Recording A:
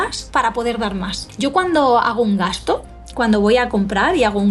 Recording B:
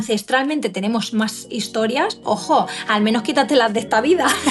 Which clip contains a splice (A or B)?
A